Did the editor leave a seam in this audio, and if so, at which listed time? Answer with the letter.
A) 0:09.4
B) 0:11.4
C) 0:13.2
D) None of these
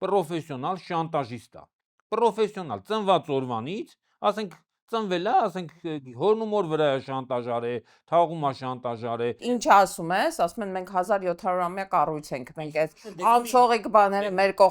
A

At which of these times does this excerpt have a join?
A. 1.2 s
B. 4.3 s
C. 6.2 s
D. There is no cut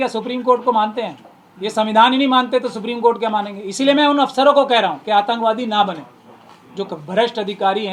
D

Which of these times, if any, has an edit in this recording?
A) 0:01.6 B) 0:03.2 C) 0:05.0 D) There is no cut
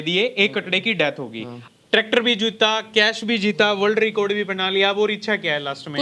A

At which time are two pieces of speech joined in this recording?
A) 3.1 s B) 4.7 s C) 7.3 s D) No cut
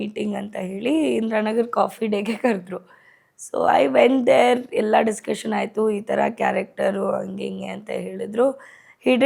D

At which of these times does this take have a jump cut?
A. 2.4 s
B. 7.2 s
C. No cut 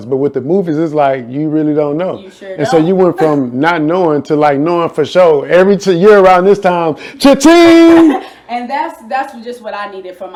C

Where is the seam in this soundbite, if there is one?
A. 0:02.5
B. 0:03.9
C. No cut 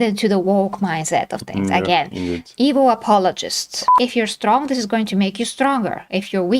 B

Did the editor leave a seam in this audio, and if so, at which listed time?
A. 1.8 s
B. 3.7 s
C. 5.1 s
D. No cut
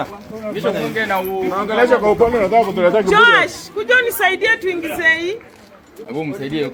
D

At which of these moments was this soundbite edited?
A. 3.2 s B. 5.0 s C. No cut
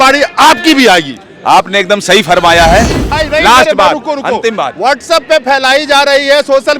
A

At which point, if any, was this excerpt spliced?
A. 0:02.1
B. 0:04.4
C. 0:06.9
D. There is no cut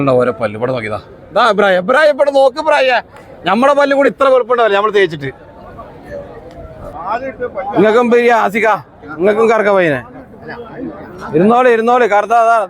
C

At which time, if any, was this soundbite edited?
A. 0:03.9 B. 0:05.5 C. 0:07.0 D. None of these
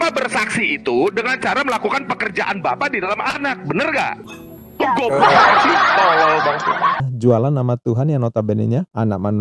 C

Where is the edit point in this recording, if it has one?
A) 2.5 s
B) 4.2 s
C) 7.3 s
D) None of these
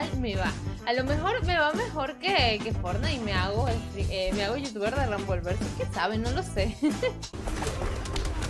C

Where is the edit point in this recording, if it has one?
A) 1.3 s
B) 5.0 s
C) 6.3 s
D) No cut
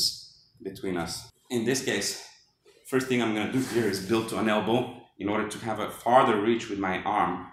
A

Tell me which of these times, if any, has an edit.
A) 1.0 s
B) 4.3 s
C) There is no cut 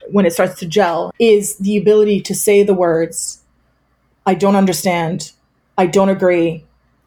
A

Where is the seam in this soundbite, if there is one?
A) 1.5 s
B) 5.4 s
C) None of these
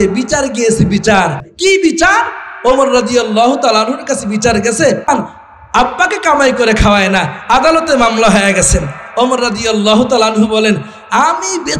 A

